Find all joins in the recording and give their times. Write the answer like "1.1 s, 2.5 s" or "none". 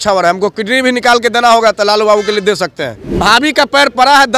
3.2 s